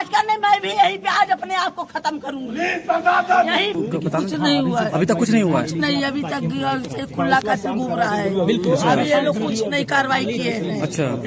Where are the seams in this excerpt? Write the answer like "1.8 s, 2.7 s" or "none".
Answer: 3.7 s